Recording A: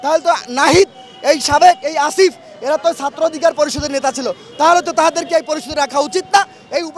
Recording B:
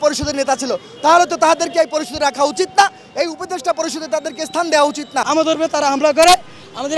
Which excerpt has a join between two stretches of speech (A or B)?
B